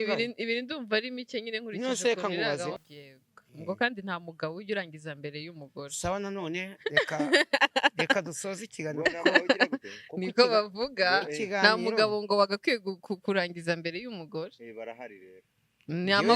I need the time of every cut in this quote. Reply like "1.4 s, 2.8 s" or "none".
2.8 s